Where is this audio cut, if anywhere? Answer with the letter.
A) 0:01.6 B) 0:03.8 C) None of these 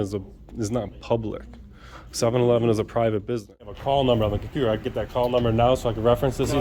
B